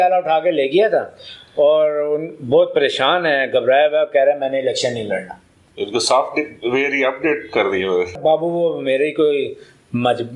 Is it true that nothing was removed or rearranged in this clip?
no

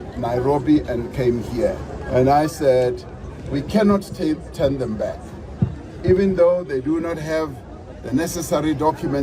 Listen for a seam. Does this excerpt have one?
yes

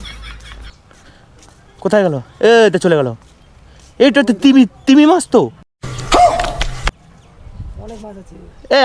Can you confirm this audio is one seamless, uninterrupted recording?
yes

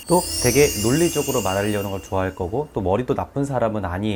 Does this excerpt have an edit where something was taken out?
no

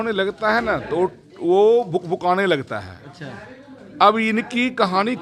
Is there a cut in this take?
no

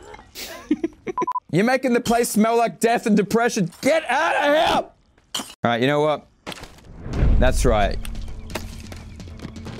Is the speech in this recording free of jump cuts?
no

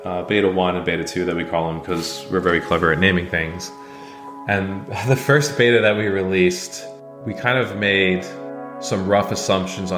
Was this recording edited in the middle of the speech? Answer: no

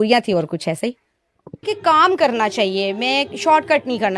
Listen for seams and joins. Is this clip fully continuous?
no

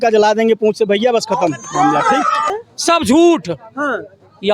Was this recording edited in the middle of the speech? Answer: yes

